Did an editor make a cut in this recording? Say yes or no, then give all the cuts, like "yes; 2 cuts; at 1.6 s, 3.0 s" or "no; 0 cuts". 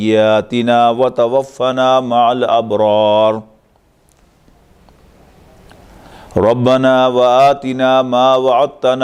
no; 0 cuts